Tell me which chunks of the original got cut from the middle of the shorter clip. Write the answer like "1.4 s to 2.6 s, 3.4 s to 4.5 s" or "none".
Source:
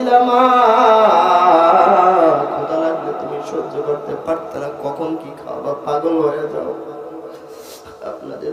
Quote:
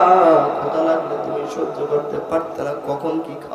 none